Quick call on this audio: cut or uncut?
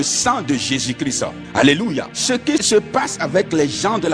cut